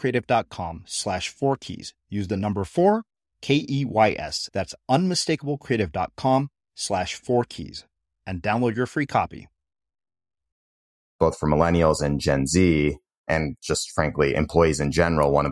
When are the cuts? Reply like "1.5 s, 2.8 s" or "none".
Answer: 11.2 s, 13.2 s